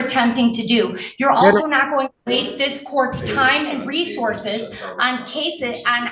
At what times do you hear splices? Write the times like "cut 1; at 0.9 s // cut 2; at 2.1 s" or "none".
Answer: none